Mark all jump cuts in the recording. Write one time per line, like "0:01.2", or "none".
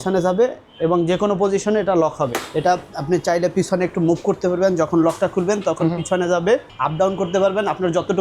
0:02.4
0:06.8

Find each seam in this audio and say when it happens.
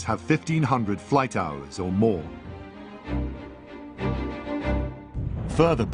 none

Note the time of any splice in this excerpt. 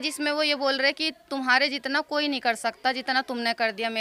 none

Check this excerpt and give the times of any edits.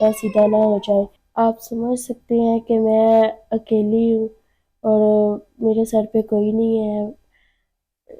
0:01.2

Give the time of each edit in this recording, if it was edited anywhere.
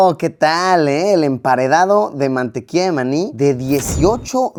none

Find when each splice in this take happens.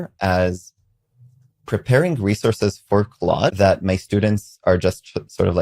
0:03.5

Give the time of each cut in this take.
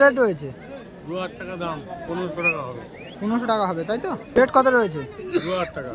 0:04.4

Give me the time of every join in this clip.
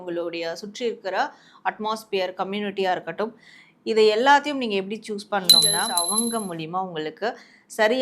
0:05.8

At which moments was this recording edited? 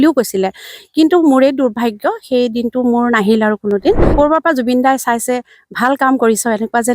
0:04.1

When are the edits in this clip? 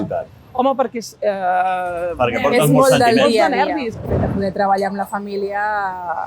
0:04.0

